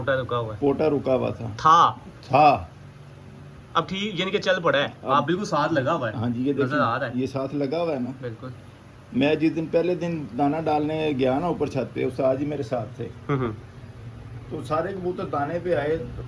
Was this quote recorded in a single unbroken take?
yes; 0 cuts

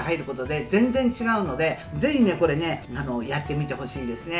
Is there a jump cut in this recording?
yes; 2 cuts; at 1.9 s, 2.9 s

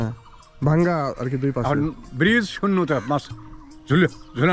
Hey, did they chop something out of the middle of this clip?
no; 0 cuts

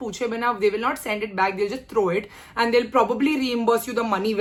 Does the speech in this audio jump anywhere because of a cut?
no; 0 cuts

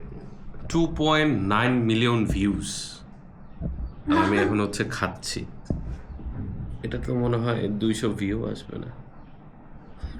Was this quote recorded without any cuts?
yes; 0 cuts

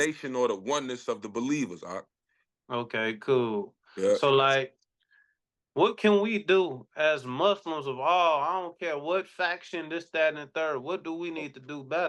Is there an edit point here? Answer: no; 0 cuts

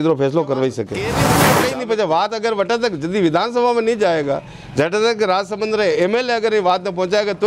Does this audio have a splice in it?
yes; 1 cut; at 1.4 s

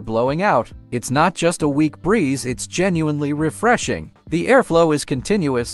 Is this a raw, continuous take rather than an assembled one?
yes; 0 cuts

